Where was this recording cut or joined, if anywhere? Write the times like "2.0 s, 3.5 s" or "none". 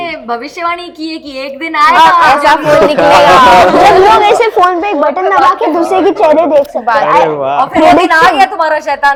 none